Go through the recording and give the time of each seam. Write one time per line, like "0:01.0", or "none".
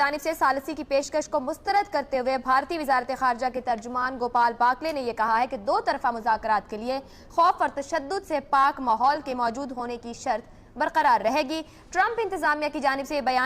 0:12.0